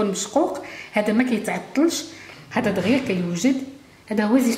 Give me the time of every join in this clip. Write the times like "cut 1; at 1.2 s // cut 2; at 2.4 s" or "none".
cut 1; at 2.2 s